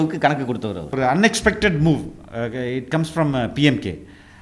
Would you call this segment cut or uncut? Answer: cut